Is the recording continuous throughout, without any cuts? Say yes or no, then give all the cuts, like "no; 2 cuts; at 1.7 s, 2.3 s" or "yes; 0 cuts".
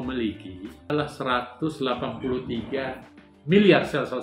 no; 1 cut; at 0.9 s